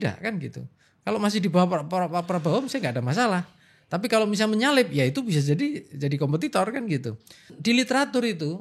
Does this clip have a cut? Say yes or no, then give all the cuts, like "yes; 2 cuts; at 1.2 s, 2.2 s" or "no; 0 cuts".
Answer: yes; 1 cut; at 7.5 s